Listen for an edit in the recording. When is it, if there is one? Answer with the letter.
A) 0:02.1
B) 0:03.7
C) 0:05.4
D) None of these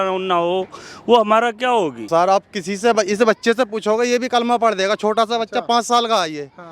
A